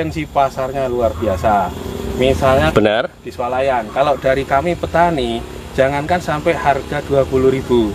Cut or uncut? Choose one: cut